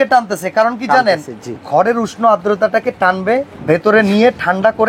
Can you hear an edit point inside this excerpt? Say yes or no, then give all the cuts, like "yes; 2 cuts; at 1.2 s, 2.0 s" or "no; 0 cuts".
yes; 1 cut; at 3.5 s